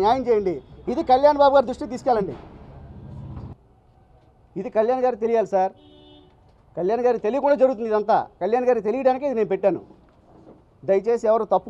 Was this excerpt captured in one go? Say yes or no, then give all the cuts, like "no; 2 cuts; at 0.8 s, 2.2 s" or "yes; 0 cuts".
no; 1 cut; at 3.5 s